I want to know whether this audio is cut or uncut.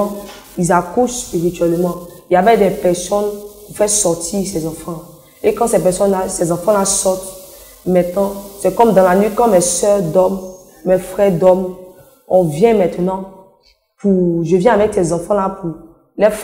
uncut